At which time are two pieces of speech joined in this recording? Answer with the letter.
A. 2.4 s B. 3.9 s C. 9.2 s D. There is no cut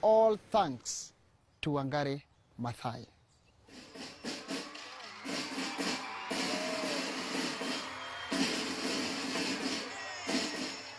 D